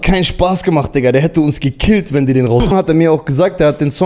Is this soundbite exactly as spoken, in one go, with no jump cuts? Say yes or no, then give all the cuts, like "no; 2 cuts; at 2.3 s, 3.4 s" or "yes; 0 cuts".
no; 1 cut; at 2.7 s